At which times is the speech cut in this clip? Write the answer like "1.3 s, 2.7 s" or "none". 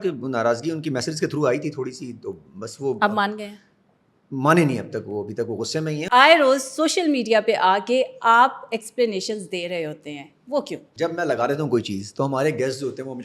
6.0 s, 10.8 s